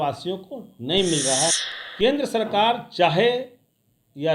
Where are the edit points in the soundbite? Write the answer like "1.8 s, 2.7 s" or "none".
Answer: 1.5 s